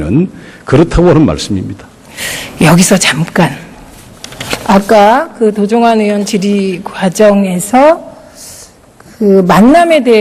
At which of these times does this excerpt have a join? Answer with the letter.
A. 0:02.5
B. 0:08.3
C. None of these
B